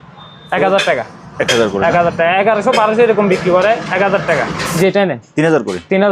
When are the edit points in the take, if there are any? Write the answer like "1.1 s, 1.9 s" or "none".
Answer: 4.7 s